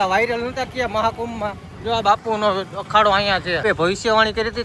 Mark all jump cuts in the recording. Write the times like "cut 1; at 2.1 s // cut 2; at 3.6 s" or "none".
cut 1; at 3.6 s

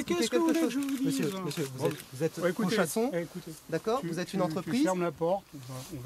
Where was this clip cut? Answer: none

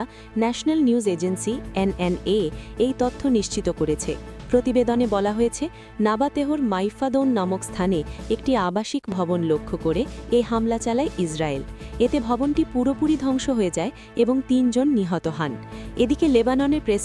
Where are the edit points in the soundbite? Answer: none

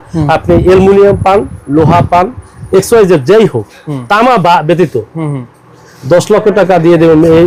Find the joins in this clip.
none

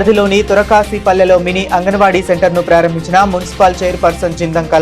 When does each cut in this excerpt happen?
none

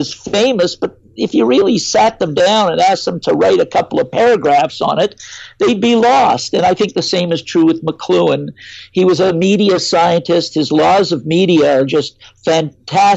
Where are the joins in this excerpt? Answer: none

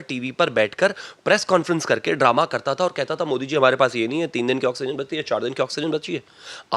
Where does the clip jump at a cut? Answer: none

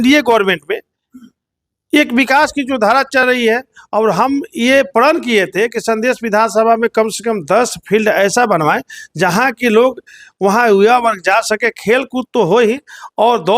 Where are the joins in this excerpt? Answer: none

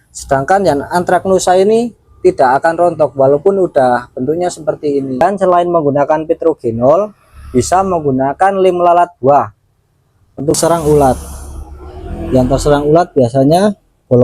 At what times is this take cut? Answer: cut 1; at 5.2 s // cut 2; at 10.6 s

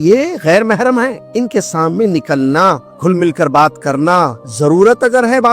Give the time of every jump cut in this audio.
cut 1; at 1.2 s // cut 2; at 2.9 s // cut 3; at 4.4 s

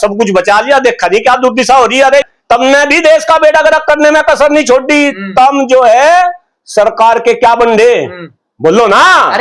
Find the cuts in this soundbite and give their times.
cut 1; at 2.2 s

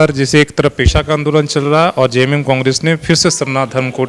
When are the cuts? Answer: none

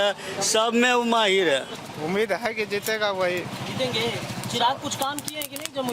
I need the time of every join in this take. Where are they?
cut 1; at 1.7 s

